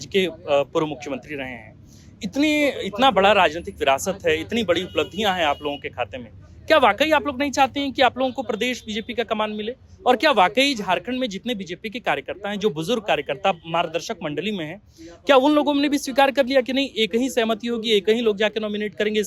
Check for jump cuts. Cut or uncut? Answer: uncut